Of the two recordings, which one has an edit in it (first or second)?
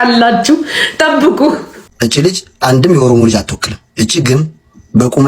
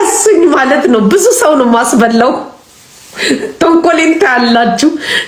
first